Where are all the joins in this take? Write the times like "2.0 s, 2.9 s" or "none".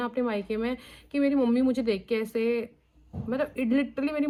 none